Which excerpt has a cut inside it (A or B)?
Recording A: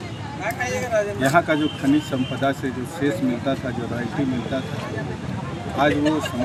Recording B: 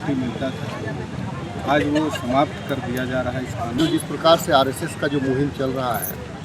B